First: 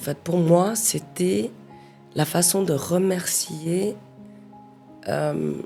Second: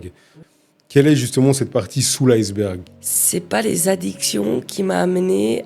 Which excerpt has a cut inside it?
second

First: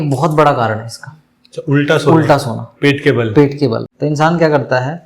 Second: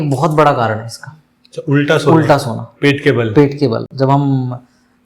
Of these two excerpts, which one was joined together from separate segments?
first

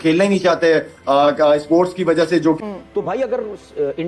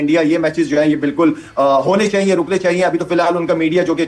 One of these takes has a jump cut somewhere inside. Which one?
first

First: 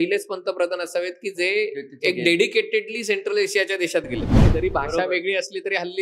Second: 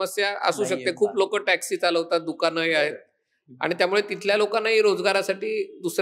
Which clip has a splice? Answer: first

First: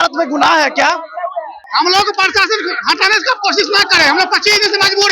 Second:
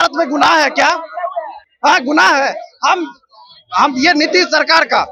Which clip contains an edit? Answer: first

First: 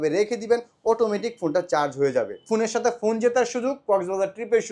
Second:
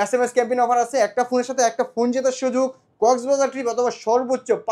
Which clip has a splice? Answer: first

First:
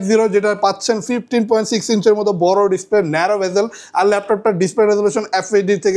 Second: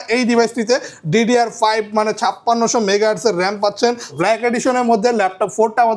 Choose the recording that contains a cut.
second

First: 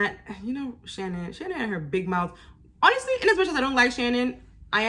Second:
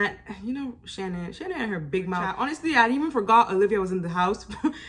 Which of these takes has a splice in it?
second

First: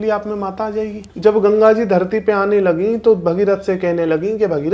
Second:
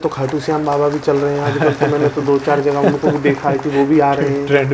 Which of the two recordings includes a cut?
first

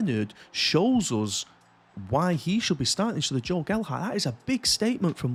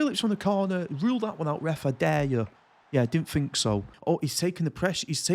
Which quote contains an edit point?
second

